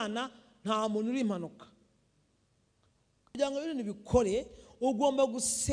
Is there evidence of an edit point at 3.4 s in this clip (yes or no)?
yes